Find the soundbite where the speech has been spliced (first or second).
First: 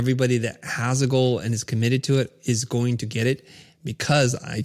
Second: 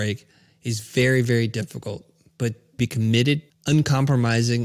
second